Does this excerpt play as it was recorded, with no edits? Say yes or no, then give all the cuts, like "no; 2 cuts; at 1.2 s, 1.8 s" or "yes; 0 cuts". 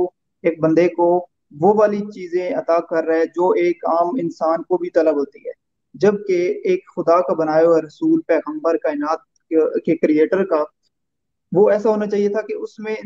yes; 0 cuts